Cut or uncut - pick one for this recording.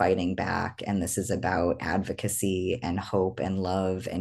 uncut